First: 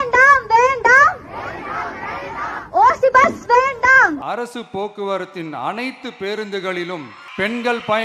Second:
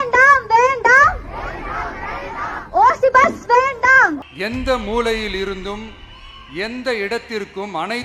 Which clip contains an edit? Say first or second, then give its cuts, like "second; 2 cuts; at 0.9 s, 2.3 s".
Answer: second; 1 cut; at 4.2 s